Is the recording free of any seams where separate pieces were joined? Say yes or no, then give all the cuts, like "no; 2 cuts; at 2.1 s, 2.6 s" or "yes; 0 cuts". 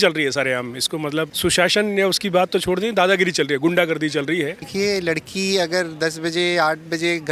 no; 2 cuts; at 1.3 s, 4.6 s